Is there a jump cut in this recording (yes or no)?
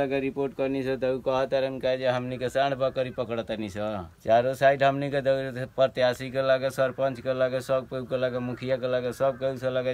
no